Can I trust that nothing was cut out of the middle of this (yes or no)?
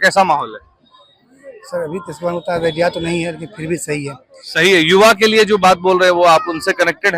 yes